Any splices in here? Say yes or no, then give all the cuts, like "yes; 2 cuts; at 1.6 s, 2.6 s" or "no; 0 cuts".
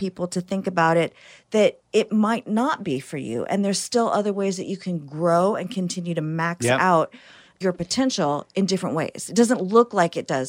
no; 0 cuts